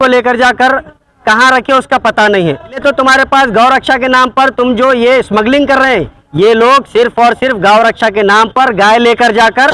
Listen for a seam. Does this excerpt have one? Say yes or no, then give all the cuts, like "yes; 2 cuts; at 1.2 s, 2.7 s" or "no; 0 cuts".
yes; 2 cuts; at 2.8 s, 6.2 s